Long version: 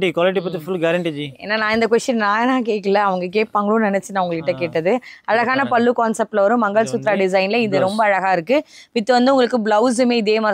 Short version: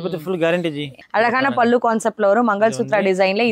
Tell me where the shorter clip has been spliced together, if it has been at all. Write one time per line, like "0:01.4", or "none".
0:01.0